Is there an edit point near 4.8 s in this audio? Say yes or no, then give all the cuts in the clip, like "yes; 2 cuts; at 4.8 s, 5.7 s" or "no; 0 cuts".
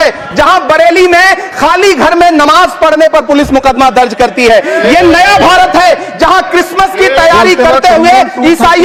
no; 0 cuts